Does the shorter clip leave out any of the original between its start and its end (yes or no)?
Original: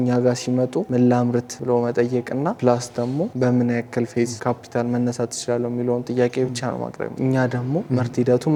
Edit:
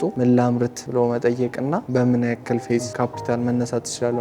yes